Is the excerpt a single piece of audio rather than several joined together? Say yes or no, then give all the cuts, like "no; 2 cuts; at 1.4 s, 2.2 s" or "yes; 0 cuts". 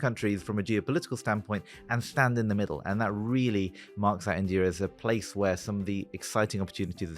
yes; 0 cuts